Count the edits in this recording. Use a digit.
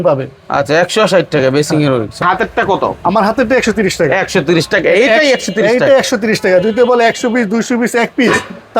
1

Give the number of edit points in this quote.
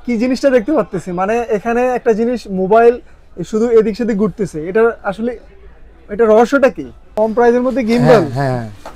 1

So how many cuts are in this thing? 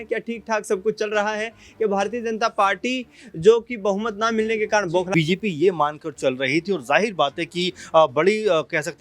1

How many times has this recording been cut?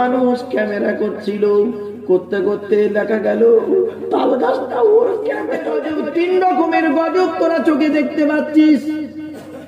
1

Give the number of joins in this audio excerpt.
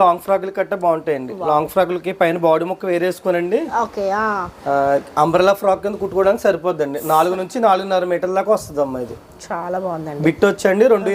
0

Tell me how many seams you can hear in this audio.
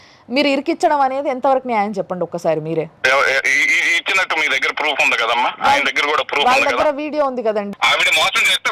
2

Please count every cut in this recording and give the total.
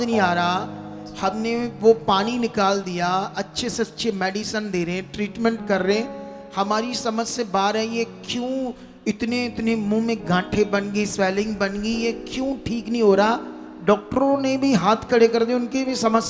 0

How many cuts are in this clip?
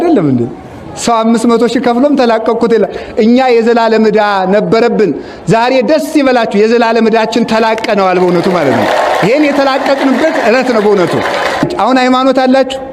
1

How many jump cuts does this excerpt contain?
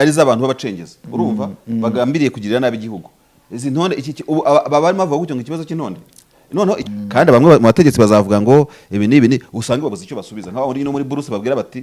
1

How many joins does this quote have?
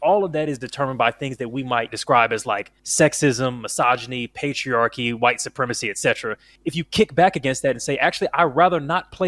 3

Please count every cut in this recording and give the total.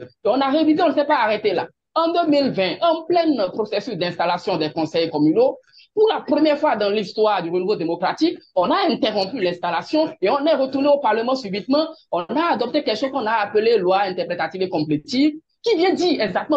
0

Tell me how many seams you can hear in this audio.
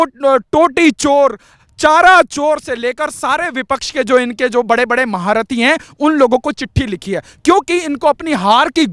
0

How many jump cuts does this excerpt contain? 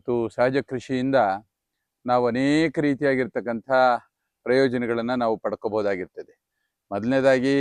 0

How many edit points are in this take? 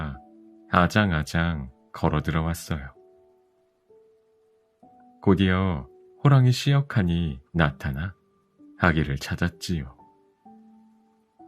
1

